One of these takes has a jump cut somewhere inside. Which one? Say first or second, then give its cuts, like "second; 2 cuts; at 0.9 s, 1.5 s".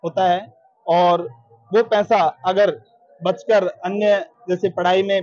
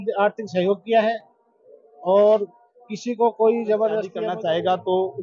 second; 1 cut; at 4.2 s